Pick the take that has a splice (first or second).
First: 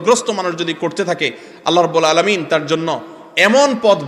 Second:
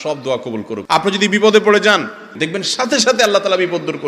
second